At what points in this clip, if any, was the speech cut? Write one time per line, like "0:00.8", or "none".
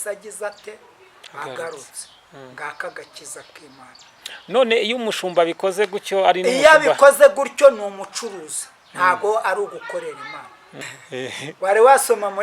none

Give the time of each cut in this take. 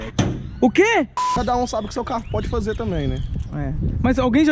0:01.4

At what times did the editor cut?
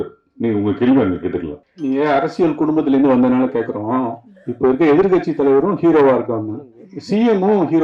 0:01.5

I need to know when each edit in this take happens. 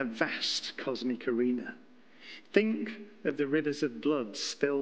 none

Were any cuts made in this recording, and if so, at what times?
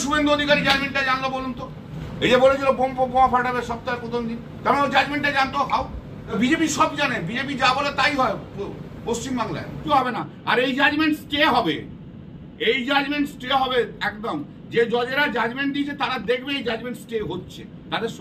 0:02.0
0:06.3
0:09.9

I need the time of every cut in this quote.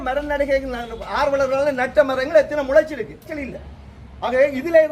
0:03.3

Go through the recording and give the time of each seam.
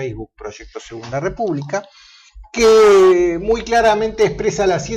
0:02.9

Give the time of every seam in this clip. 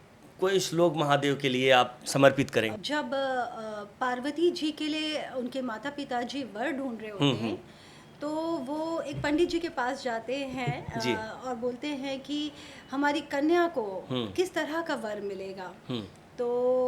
0:02.8

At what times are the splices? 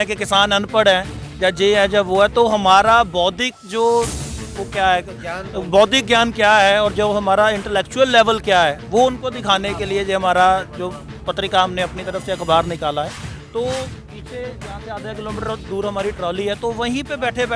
0:13.2

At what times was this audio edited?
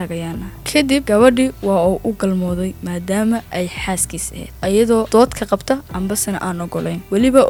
none

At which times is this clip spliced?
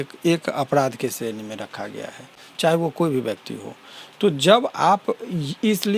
none

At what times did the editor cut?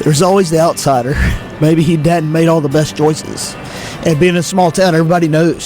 0:01.6

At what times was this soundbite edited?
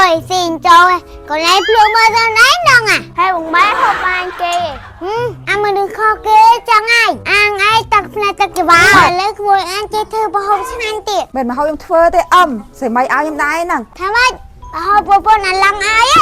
0:09.1

